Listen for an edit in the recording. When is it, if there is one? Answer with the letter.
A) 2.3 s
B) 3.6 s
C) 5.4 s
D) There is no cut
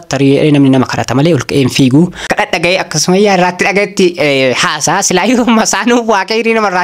A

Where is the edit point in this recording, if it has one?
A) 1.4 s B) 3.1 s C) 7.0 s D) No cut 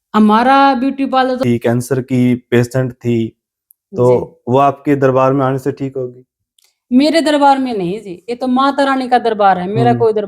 A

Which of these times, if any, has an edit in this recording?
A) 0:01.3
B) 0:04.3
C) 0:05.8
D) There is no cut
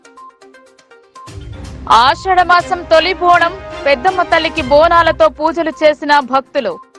A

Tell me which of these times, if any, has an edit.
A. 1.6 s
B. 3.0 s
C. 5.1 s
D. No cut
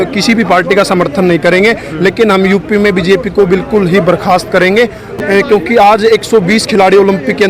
C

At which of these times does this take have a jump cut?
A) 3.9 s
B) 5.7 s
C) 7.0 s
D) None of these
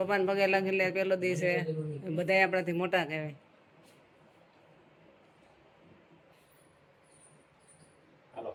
D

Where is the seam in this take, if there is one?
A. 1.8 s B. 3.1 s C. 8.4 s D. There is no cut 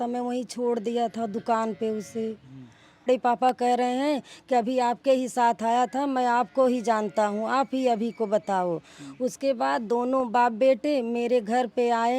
B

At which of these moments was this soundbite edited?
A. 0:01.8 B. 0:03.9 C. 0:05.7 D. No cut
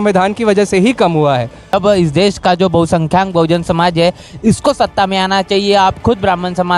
A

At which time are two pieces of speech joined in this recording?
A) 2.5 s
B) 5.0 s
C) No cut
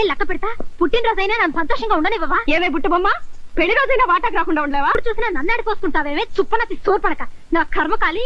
B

